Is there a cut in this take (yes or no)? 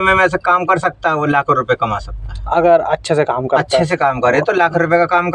no